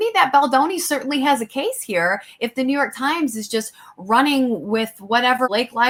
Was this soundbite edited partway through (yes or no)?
no